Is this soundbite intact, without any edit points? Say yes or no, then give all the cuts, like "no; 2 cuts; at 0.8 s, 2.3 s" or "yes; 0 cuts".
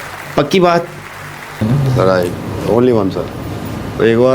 no; 1 cut; at 1.6 s